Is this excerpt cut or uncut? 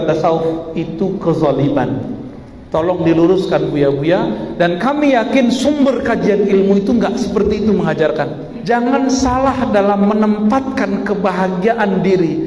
cut